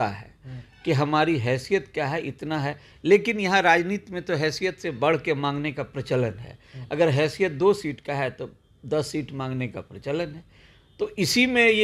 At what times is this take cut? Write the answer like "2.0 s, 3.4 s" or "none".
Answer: none